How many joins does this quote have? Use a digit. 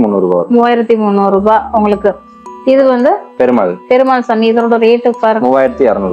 0